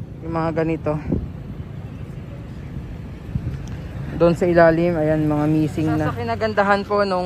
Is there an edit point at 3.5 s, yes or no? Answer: no